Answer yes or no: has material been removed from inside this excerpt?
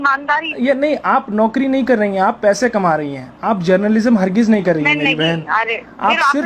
no